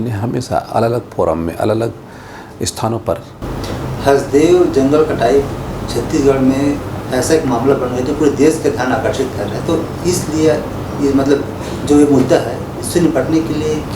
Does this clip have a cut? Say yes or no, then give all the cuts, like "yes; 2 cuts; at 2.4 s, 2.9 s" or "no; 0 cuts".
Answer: yes; 1 cut; at 3.3 s